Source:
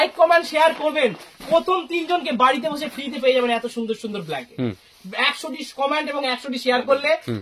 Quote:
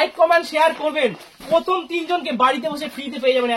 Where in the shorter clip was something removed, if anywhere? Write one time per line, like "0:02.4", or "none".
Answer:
none